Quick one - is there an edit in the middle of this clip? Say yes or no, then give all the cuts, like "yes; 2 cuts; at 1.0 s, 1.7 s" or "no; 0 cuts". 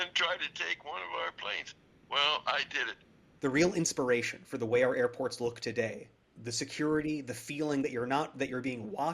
yes; 1 cut; at 3.2 s